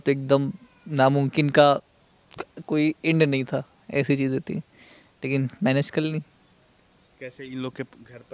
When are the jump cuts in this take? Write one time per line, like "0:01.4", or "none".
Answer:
none